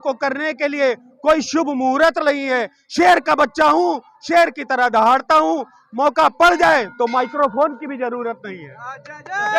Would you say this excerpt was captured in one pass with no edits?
yes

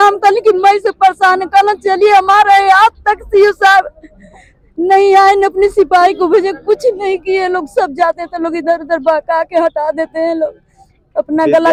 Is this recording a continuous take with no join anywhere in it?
yes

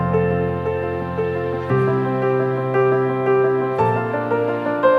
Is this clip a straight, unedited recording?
yes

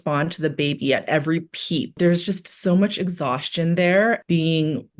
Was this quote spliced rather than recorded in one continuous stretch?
yes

